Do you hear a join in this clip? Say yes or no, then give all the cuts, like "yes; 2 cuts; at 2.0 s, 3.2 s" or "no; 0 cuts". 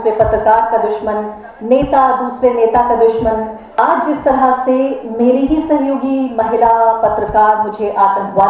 yes; 1 cut; at 3.6 s